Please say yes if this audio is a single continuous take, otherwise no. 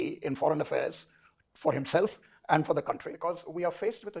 no